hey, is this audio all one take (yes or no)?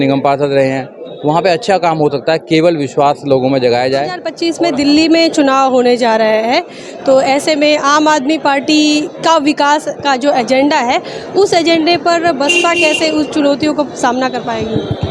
no